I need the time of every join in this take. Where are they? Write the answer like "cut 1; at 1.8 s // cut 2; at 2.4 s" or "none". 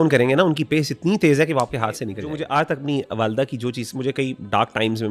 cut 1; at 2.2 s

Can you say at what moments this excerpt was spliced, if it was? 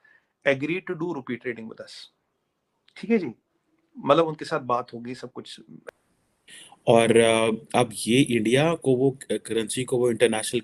cut 1; at 5.7 s

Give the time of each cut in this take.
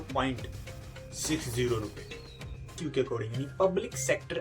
cut 1; at 2.8 s

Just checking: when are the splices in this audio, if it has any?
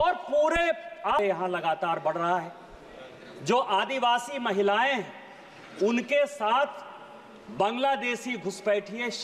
cut 1; at 1.2 s

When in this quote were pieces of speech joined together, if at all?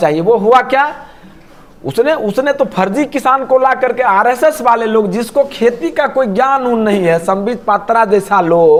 none

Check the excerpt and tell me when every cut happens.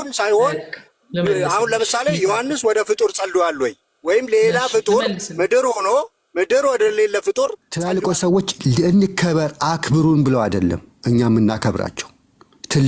cut 1; at 7.7 s

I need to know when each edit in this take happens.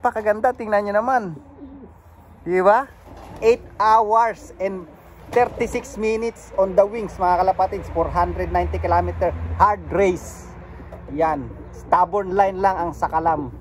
none

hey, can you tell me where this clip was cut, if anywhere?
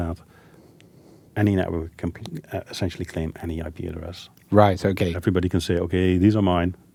none

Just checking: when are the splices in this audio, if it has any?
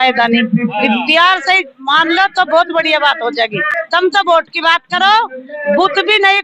cut 1; at 3.6 s

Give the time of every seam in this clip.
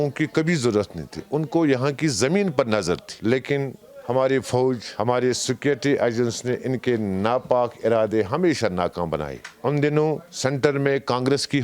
none

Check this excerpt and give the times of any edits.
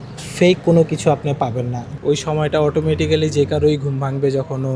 cut 1; at 1.8 s

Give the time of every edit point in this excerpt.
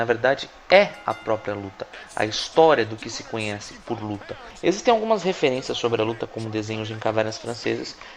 cut 1; at 6.4 s

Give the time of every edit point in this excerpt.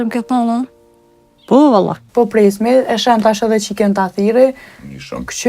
cut 1; at 2.0 s

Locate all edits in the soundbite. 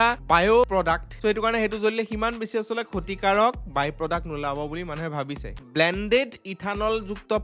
cut 1; at 5.6 s

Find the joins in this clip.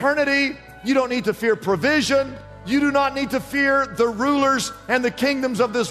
cut 1; at 2.5 s

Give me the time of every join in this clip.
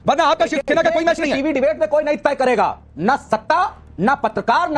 none

